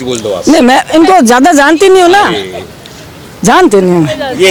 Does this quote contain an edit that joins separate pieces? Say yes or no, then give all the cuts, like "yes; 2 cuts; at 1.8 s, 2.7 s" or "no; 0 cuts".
no; 0 cuts